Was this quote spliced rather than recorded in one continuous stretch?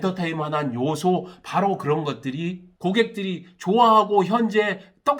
yes; 1 cut; at 2.7 s

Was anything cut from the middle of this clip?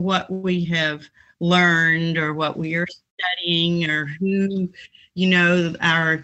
no; 0 cuts

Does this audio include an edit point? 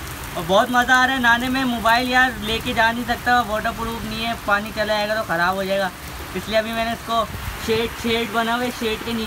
no; 0 cuts

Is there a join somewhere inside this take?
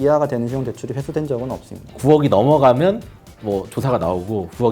yes; 1 cut; at 2.1 s

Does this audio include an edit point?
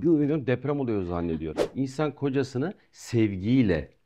yes; 1 cut; at 1.6 s

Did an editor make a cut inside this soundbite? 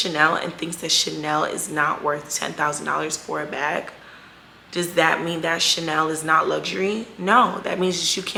no; 0 cuts

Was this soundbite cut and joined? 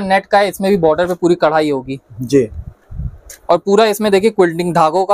no; 0 cuts

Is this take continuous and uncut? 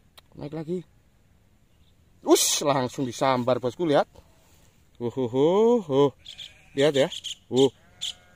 yes; 0 cuts

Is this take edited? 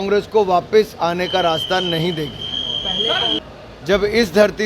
yes; 1 cut; at 3.3 s

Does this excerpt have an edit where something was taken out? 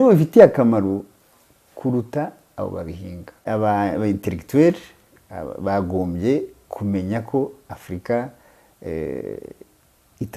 yes; 1 cut; at 3.4 s

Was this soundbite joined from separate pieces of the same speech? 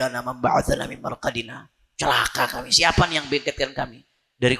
no; 0 cuts

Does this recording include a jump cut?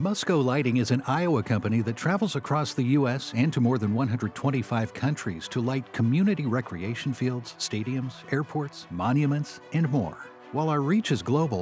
no; 0 cuts

